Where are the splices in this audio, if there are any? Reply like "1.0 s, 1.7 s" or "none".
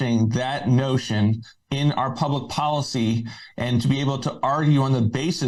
none